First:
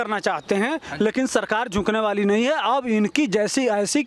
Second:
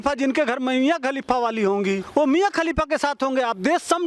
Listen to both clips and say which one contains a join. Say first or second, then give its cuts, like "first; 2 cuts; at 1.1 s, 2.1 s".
second; 1 cut; at 2.0 s